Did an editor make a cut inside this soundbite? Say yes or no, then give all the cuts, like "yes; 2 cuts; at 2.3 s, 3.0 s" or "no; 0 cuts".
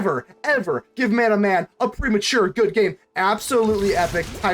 yes; 1 cut; at 3.0 s